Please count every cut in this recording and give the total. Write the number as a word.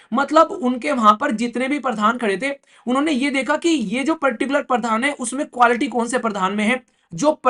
zero